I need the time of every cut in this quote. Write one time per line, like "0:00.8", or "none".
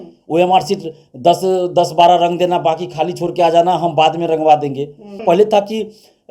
0:05.2